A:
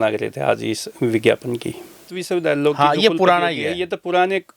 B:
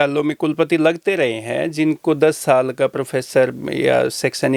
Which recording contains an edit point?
A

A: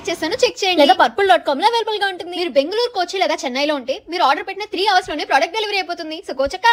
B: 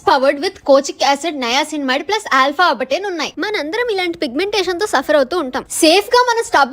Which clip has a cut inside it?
B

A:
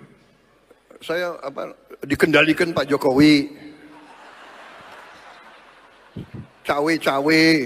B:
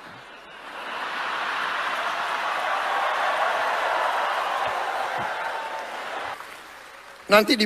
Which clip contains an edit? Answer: B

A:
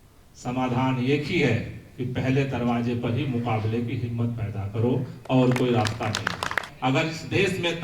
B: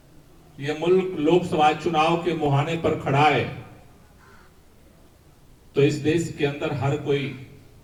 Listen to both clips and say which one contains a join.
A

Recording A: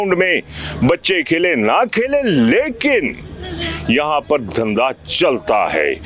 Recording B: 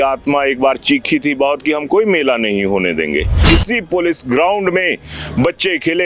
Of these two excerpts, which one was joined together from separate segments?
B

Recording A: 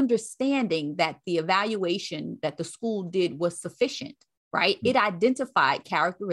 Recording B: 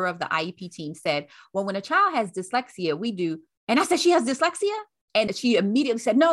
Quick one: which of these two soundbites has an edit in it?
B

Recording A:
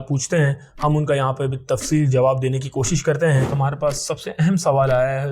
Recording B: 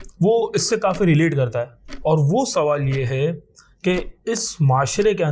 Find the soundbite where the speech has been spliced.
A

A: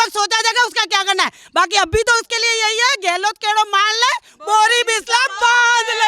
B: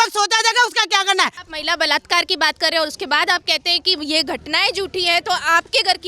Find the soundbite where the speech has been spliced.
B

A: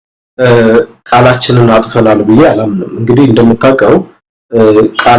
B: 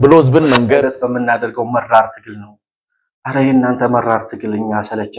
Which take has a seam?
B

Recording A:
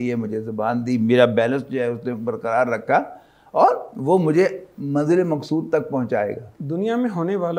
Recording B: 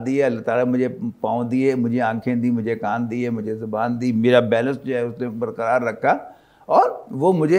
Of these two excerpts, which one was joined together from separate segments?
A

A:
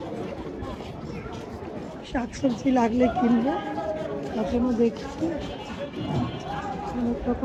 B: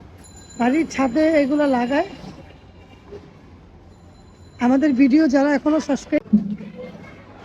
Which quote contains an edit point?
B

